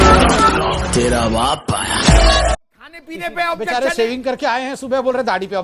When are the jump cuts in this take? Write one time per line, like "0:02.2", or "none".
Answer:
0:02.7